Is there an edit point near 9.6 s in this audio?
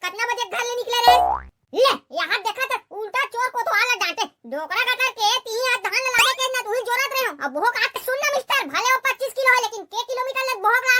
no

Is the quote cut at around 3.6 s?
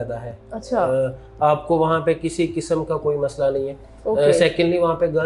no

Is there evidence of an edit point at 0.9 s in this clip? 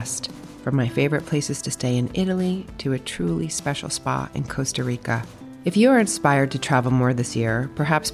no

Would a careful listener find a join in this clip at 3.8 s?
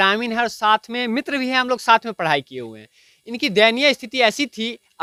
no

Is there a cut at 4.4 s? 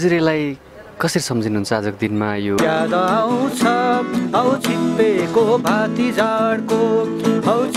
no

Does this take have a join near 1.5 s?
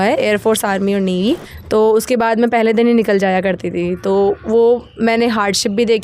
yes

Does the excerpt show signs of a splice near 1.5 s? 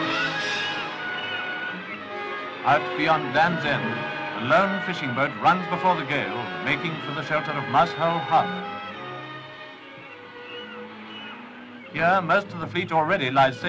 yes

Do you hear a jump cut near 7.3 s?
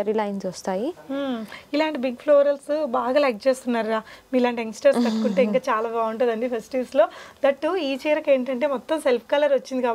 no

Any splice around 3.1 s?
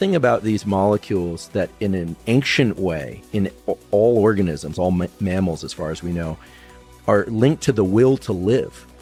no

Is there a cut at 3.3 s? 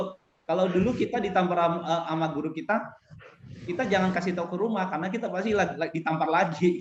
no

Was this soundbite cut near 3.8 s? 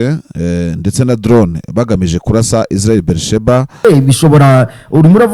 yes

